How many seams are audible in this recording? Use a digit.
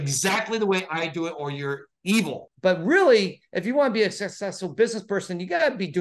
1